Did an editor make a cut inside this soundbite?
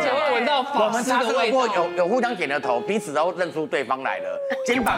no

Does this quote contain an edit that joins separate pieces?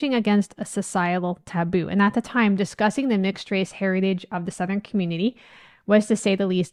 no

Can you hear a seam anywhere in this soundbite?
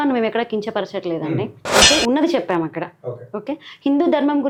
no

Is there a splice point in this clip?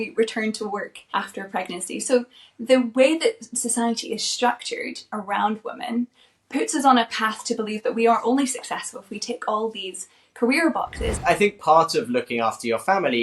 yes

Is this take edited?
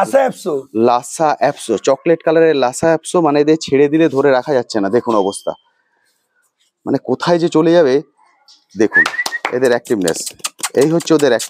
no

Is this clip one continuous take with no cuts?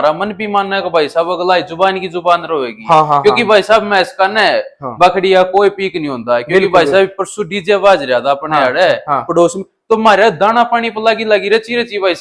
yes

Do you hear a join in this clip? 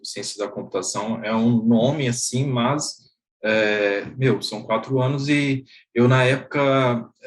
no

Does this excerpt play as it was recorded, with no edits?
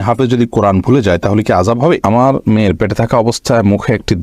no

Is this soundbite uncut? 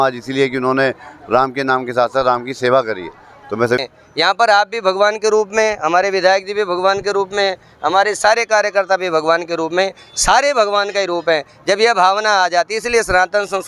no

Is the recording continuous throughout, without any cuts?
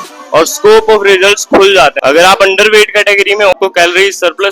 no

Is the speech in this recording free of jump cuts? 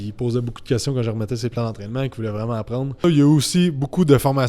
no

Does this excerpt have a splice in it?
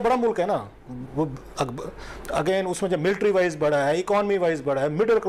no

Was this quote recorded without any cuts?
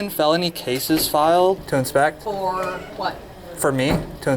no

